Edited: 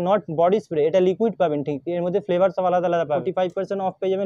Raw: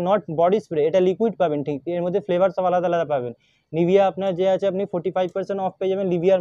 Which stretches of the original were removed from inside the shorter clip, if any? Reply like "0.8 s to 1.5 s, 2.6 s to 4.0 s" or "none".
3.2 s to 5.0 s